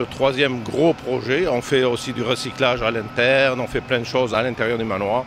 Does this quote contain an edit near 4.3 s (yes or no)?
yes